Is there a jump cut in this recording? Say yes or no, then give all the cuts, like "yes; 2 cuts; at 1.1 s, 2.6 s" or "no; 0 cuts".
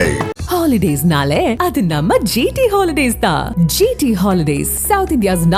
no; 0 cuts